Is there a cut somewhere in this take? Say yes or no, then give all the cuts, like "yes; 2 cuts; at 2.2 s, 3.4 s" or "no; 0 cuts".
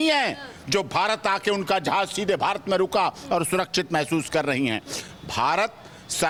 no; 0 cuts